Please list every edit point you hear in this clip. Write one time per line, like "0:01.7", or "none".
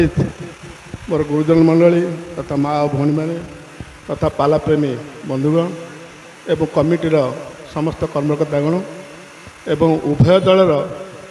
none

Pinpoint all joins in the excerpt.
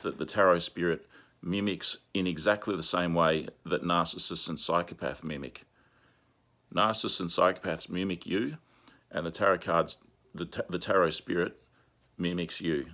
none

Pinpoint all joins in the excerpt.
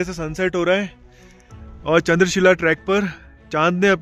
none

